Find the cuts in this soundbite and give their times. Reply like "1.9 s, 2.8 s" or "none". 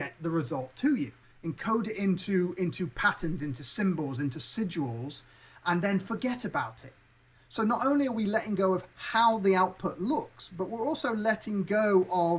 1.3 s